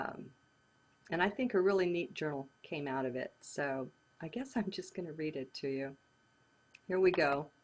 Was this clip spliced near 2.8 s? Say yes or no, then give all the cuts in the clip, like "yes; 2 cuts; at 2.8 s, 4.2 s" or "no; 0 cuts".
no; 0 cuts